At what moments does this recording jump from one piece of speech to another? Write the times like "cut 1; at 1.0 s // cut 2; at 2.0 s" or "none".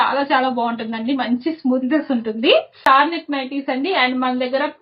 cut 1; at 2.8 s